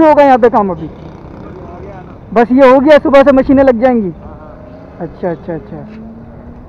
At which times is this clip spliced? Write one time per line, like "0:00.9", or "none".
none